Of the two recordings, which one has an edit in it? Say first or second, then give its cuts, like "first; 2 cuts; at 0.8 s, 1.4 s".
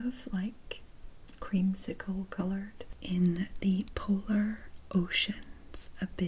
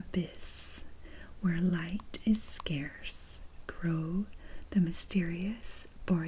first; 1 cut; at 2.9 s